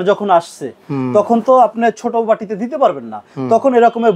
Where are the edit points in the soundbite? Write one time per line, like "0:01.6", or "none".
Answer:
none